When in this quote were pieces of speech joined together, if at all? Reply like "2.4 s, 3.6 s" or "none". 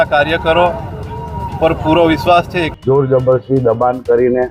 2.6 s